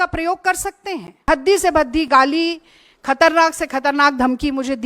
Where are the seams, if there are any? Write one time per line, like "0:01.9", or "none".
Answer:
0:01.3